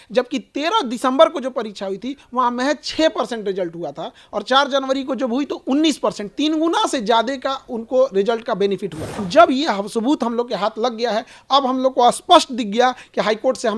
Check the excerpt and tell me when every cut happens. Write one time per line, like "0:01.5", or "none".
0:09.3